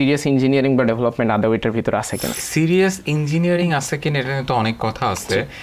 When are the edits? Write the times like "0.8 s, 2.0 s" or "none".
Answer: 2.4 s

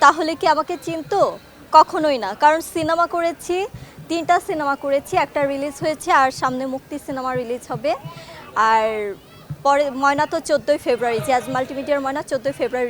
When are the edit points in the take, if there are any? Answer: none

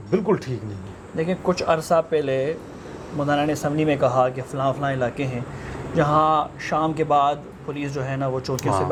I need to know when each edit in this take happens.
none

